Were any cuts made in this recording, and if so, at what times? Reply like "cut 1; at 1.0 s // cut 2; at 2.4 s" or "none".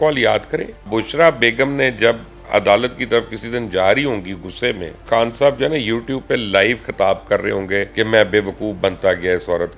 cut 1; at 0.9 s // cut 2; at 5.1 s // cut 3; at 7.9 s